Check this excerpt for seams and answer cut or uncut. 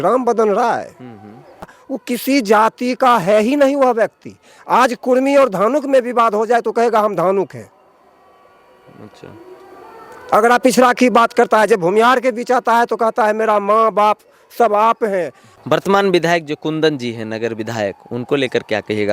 cut